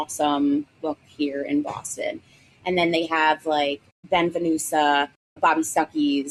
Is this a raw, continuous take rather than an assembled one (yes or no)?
yes